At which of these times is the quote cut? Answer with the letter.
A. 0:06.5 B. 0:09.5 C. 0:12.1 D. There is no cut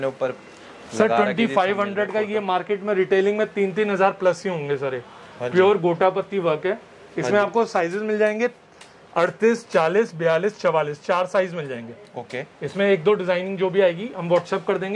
D